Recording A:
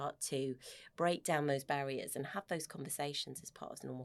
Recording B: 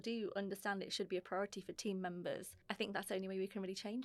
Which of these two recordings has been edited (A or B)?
B